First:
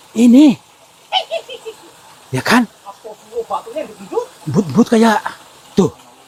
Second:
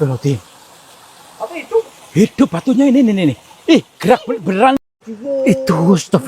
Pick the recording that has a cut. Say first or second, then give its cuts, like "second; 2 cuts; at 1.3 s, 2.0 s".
second; 1 cut; at 4.8 s